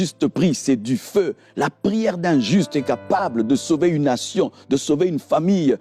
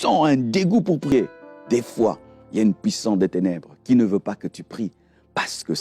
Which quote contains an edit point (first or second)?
second